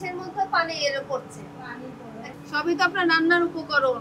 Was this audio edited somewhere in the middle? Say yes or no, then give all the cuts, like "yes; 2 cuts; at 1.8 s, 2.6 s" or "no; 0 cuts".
yes; 1 cut; at 2.3 s